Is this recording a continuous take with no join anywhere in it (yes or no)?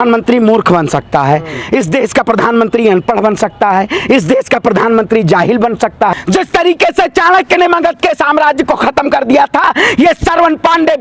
no